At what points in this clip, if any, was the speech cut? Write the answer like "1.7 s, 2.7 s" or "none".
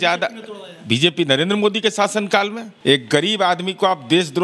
2.7 s